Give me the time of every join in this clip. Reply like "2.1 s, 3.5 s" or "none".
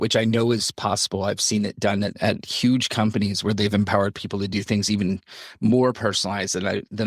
2.2 s